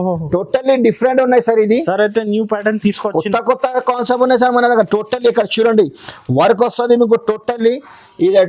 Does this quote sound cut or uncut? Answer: uncut